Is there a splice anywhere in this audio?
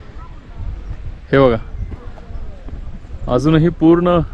no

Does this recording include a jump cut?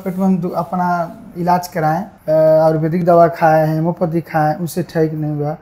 yes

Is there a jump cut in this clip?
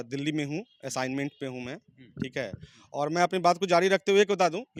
no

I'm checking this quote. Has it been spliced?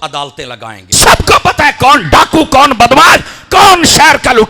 yes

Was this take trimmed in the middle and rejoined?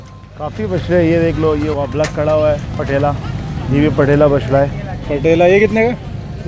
yes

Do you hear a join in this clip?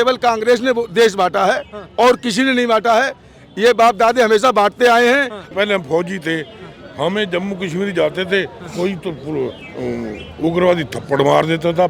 yes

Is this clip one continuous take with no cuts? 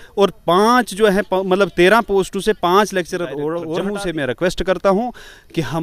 no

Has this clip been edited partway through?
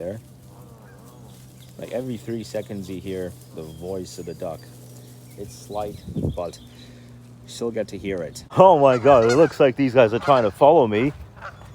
no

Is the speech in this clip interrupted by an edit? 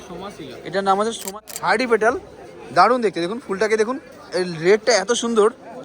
yes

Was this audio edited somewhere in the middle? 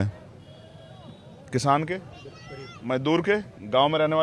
no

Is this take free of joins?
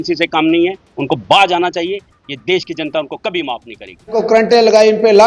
no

